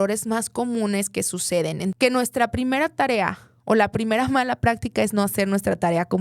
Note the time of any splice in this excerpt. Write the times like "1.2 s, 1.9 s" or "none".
1.9 s